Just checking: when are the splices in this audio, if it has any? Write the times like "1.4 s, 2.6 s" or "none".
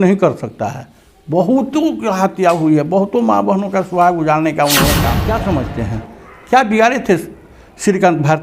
5.2 s